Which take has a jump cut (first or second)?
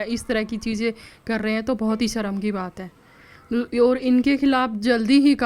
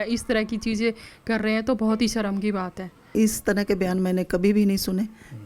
second